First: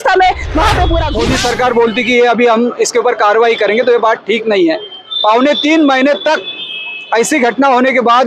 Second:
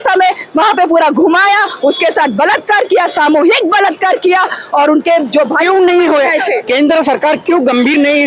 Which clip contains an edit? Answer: first; 1 cut; at 1.1 s

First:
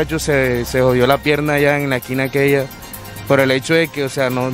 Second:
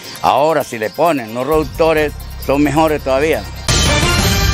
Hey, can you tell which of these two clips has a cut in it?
second; 1 cut; at 3.6 s

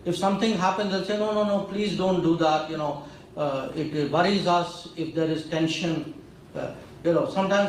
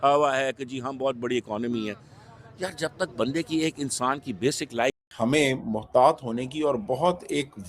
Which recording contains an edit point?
second; 1 cut; at 5.1 s

